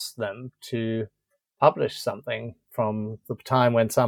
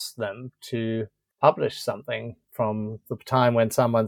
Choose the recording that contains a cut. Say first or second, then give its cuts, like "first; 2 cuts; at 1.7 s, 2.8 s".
second; 1 cut; at 1.2 s